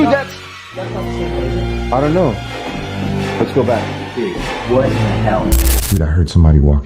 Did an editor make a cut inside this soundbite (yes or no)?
yes